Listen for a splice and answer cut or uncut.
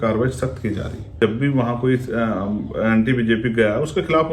cut